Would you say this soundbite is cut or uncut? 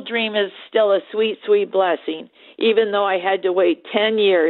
uncut